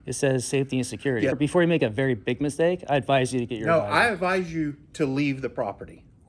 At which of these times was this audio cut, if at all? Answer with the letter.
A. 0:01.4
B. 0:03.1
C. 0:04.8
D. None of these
A